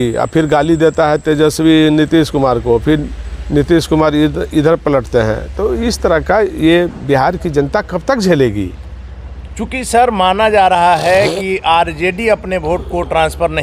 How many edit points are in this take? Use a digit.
0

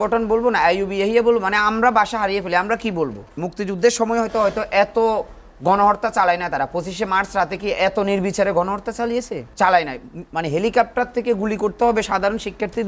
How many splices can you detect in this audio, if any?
2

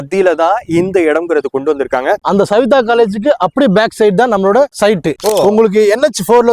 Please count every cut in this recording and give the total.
1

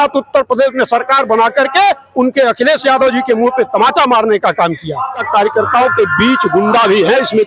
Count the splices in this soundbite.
1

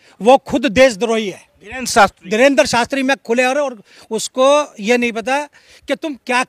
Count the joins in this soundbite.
0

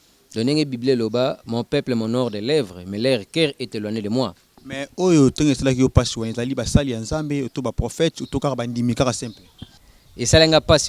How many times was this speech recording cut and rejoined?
2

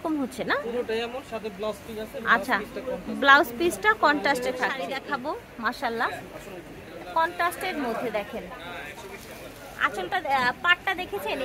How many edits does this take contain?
1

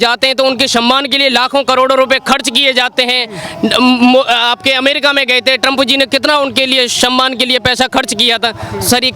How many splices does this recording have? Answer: 0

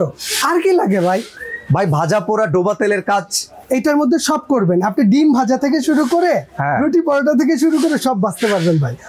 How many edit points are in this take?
0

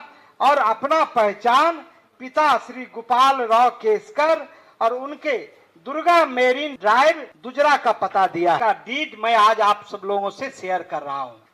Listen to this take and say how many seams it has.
1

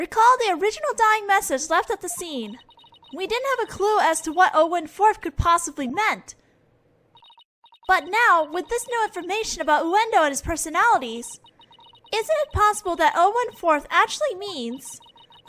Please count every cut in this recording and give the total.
1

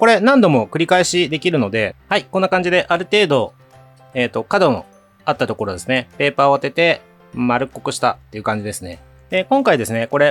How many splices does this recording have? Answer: 2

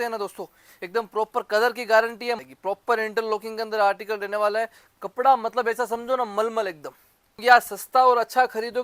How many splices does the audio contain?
2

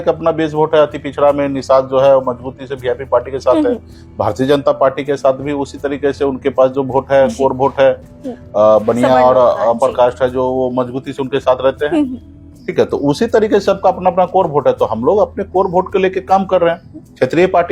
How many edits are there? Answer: 0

